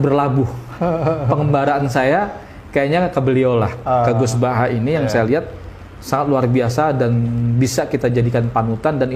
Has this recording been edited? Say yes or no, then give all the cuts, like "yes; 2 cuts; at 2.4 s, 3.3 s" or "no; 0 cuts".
no; 0 cuts